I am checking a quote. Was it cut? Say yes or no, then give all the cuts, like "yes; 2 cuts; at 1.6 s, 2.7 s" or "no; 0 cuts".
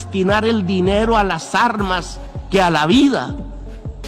no; 0 cuts